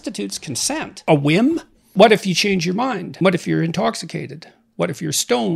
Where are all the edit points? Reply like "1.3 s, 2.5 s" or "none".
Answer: 0.9 s, 1.8 s, 3.1 s